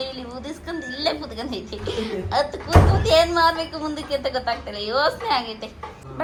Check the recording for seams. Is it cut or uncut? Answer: uncut